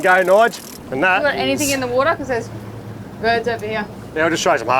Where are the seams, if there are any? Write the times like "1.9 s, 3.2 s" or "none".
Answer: 1.2 s